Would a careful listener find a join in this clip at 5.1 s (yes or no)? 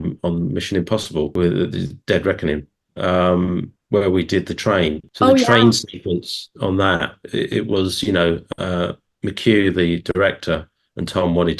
yes